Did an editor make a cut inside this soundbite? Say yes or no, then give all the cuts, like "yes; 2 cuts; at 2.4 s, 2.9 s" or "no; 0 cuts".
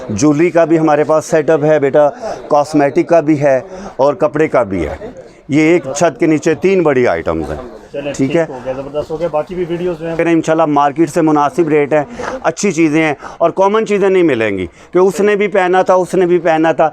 yes; 1 cut; at 10.2 s